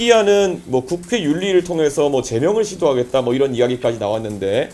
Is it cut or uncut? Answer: uncut